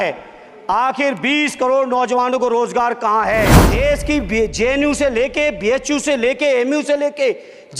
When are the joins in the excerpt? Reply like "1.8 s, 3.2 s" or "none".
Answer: 3.6 s